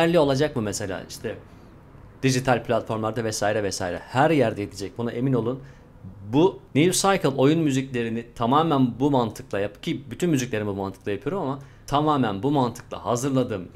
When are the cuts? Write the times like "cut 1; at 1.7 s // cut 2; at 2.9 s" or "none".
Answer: cut 1; at 11.7 s